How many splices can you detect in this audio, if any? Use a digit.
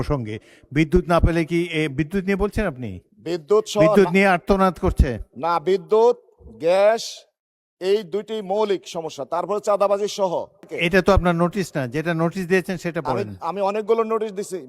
1